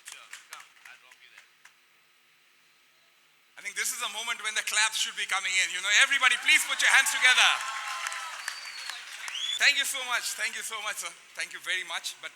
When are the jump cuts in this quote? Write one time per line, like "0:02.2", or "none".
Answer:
0:09.4